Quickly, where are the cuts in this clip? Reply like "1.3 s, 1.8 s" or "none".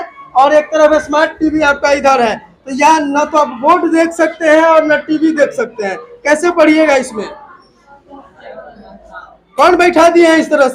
none